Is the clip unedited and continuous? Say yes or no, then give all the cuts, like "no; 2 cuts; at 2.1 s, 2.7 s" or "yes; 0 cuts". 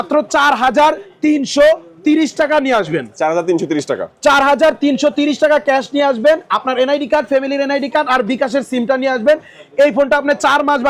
yes; 0 cuts